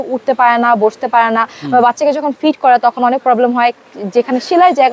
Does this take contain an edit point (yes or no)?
no